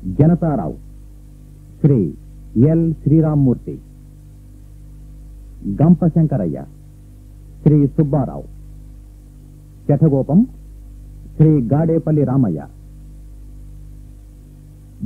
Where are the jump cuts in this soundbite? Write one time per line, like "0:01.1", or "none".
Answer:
none